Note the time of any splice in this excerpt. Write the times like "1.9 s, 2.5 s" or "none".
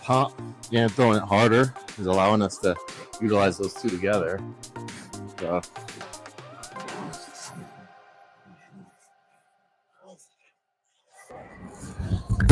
none